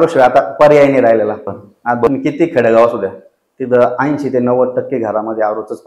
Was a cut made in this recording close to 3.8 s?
no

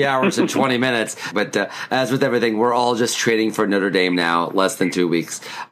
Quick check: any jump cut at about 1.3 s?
yes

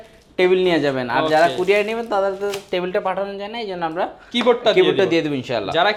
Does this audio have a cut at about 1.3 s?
no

